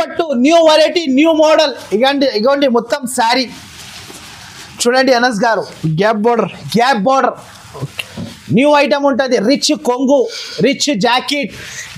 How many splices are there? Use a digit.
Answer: 0